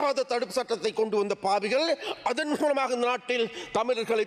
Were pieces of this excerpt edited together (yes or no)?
no